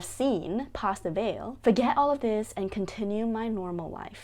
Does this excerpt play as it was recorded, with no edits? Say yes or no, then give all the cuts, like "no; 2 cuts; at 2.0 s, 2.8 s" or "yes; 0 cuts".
no; 1 cut; at 1.5 s